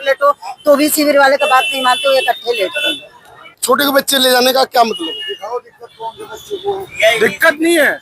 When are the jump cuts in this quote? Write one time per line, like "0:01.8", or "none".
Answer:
0:03.4